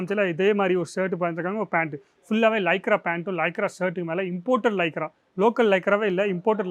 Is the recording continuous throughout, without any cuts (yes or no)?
yes